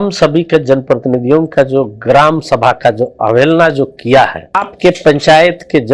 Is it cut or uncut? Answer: cut